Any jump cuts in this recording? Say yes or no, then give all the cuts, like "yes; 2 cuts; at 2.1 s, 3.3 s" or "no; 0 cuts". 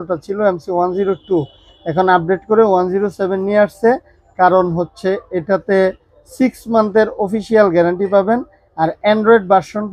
no; 0 cuts